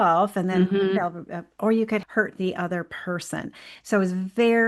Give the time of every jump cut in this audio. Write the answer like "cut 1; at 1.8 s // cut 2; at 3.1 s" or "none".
cut 1; at 2.0 s